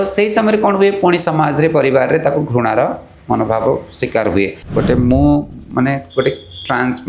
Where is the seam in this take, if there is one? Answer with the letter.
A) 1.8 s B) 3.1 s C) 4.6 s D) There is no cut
C